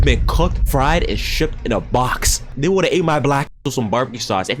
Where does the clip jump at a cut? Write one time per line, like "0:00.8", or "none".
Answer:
none